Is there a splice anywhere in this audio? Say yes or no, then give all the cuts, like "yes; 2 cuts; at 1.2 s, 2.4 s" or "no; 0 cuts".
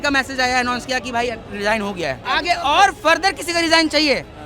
yes; 1 cut; at 2.2 s